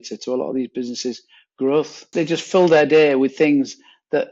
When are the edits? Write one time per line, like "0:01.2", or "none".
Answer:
0:02.1